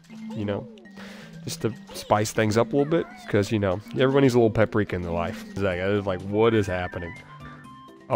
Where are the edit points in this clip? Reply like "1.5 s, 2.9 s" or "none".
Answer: 5.6 s